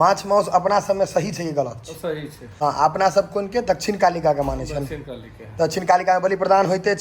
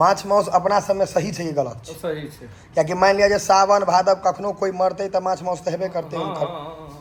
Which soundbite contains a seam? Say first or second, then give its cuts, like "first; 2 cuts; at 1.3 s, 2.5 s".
first; 1 cut; at 2.4 s